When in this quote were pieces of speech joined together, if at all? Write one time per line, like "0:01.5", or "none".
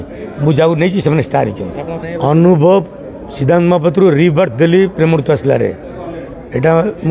0:02.0